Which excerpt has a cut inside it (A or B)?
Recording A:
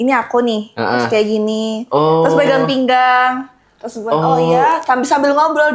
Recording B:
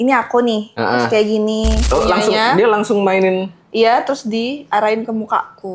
B